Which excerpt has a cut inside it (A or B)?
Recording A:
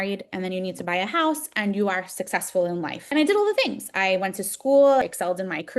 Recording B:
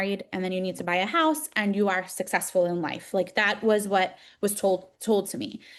A